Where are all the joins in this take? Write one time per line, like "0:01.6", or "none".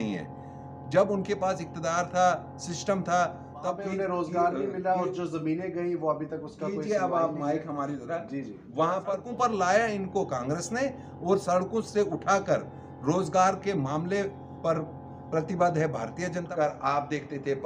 0:03.7
0:09.2
0:16.5